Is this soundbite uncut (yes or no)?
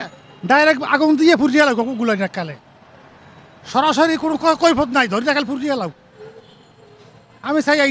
yes